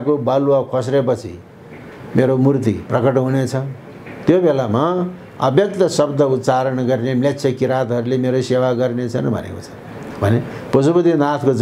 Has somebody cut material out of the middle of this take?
no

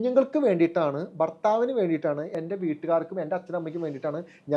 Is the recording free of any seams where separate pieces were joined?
no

